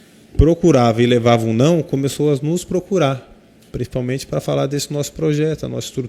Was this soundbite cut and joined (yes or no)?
no